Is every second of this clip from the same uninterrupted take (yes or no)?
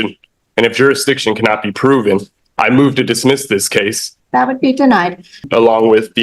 no